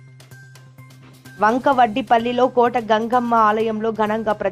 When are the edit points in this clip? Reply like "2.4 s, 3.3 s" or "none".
1.0 s